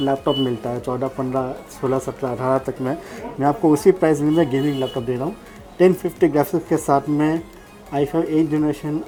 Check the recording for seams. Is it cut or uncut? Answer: uncut